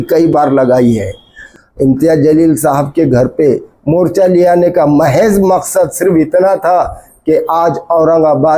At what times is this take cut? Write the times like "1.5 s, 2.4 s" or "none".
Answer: 1.4 s